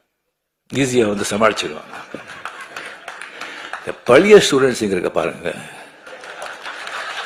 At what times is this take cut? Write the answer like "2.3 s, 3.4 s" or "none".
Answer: none